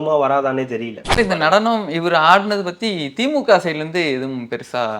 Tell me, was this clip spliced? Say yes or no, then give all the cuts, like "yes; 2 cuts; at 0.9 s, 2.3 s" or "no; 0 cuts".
yes; 1 cut; at 1.0 s